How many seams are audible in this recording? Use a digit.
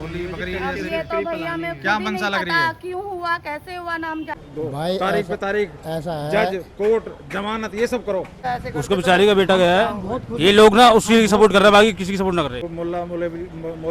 3